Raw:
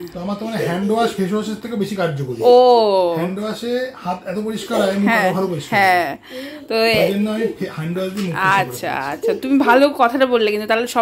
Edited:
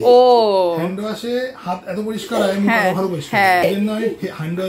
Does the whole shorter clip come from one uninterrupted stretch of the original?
no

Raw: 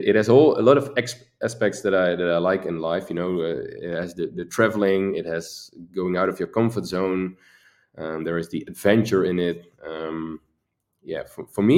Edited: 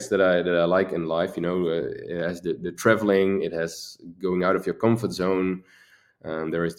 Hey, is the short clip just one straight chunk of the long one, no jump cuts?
yes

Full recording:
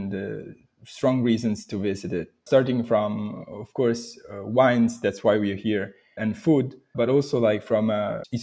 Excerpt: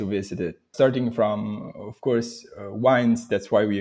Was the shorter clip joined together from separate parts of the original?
no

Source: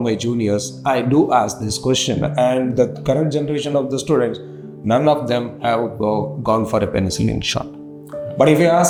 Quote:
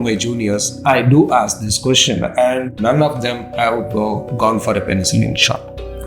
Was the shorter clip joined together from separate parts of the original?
yes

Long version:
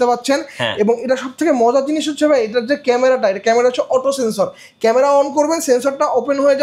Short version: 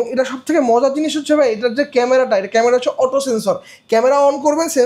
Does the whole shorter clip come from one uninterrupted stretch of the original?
yes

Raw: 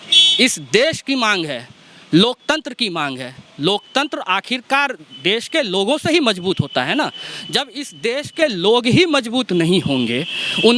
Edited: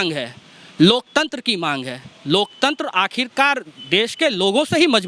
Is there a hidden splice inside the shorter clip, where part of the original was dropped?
no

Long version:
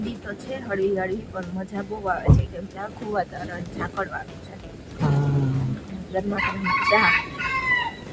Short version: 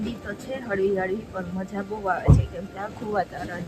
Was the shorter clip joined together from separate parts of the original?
no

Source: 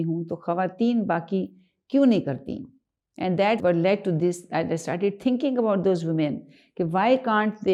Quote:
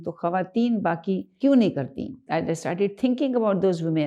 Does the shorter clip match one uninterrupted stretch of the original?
no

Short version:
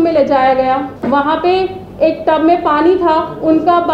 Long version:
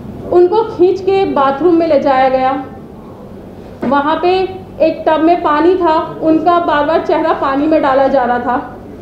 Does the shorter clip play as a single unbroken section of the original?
no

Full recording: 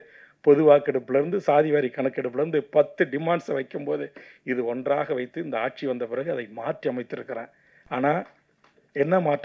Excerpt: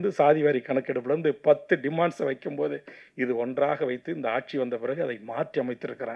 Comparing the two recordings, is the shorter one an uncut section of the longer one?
yes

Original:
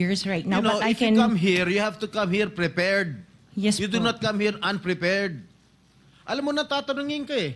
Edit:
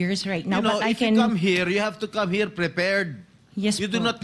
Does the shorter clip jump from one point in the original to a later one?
no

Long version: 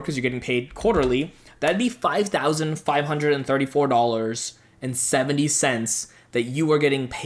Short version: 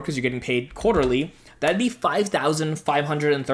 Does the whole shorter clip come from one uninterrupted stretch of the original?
yes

